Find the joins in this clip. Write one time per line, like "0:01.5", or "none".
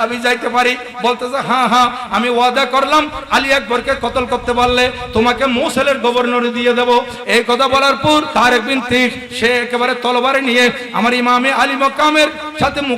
0:08.3